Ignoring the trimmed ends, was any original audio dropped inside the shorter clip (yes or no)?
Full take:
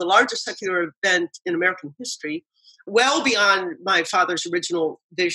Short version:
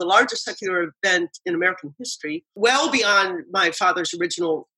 yes